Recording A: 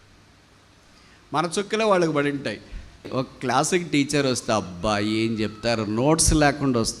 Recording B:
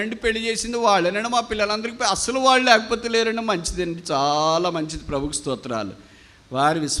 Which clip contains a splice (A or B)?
A